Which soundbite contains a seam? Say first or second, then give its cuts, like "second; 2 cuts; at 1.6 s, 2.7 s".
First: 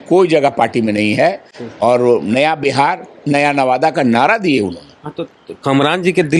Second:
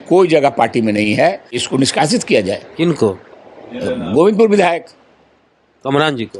second; 1 cut; at 1.6 s